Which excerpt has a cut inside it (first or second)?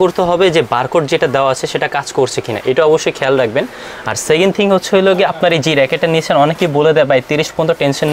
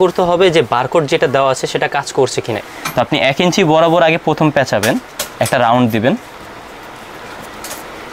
second